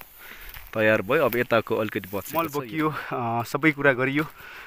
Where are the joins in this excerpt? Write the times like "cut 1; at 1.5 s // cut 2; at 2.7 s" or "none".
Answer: cut 1; at 2.3 s